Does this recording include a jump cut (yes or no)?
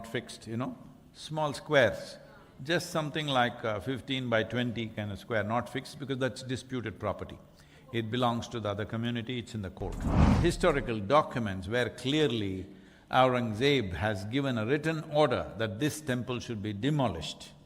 yes